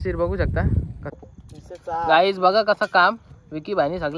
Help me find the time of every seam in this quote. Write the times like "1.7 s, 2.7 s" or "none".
1.1 s